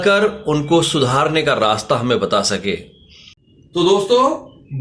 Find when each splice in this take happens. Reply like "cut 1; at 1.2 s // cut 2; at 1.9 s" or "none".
cut 1; at 3.3 s